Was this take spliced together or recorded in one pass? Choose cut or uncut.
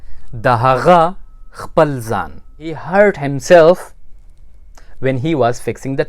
cut